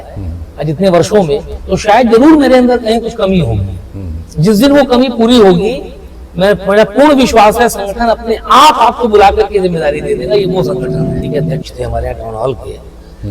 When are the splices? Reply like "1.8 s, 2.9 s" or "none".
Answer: 11.1 s